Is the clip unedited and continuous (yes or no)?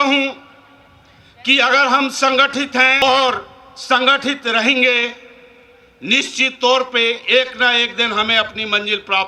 no